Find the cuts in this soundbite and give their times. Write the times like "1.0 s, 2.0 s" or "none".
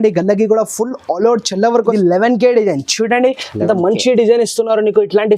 1.9 s

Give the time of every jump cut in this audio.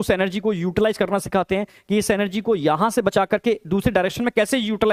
none

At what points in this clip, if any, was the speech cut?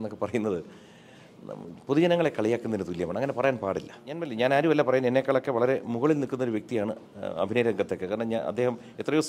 4.3 s

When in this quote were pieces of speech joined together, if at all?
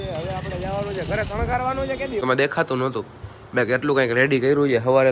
2.2 s

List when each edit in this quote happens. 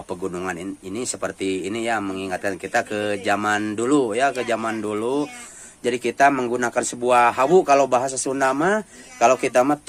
none

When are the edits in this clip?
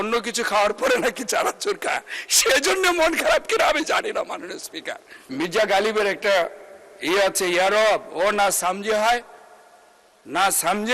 5.3 s

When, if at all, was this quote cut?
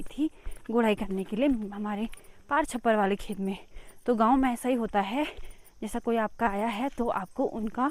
none

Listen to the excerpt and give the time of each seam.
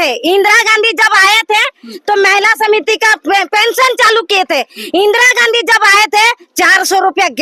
none

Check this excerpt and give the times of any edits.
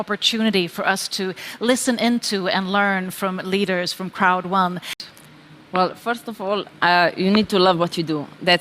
4.9 s

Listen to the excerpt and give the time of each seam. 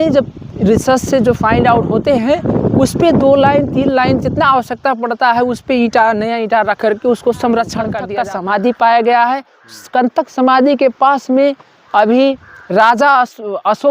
8.0 s

